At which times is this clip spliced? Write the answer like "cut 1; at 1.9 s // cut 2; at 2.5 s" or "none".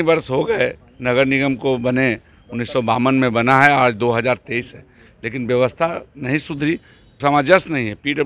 cut 1; at 7.2 s